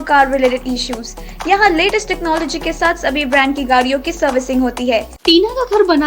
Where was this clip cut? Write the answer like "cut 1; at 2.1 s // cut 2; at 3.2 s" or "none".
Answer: cut 1; at 5.1 s